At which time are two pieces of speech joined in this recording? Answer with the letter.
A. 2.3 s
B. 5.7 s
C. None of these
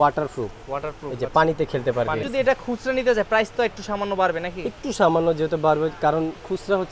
A